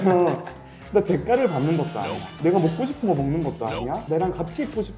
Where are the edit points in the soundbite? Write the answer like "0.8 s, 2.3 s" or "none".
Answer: 2.3 s, 4.0 s